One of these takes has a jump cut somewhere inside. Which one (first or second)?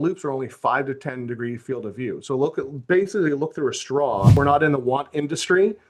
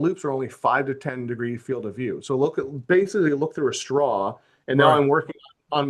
first